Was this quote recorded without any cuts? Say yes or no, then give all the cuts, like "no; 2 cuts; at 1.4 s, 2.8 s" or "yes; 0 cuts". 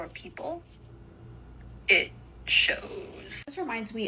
yes; 0 cuts